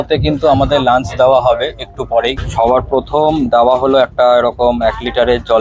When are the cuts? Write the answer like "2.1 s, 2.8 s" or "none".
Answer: 2.4 s